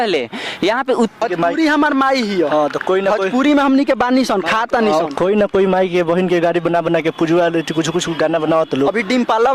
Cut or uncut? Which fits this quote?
cut